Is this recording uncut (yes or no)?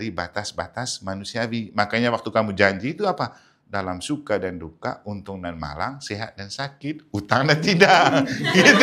yes